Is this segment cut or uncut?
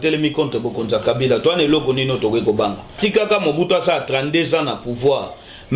cut